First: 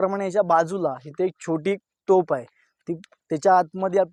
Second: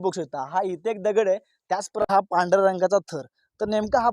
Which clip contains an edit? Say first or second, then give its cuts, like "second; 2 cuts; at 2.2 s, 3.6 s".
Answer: second; 1 cut; at 2.1 s